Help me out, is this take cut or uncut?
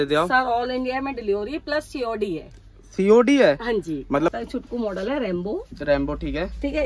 cut